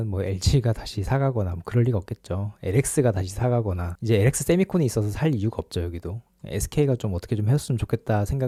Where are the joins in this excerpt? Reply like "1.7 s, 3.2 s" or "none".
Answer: none